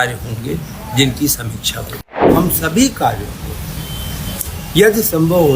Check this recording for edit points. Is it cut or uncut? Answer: cut